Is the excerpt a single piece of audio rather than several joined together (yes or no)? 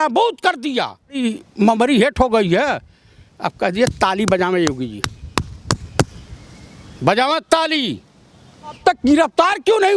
no